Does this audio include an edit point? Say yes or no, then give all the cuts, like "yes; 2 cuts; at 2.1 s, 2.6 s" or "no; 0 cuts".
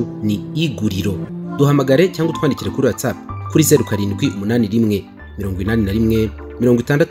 yes; 1 cut; at 1.2 s